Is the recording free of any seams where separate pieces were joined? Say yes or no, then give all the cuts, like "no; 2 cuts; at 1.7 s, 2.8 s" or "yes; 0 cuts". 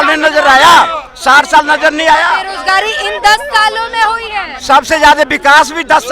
no; 1 cut; at 2.5 s